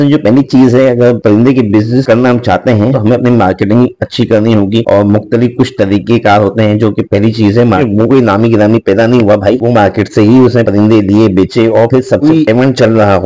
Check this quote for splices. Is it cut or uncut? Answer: cut